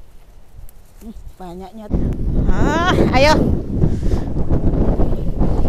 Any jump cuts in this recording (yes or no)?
yes